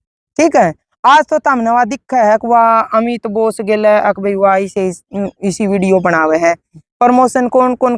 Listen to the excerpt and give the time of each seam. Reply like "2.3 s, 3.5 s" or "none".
none